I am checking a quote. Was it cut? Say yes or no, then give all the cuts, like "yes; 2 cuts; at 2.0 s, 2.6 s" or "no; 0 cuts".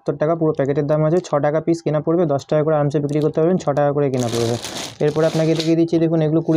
no; 0 cuts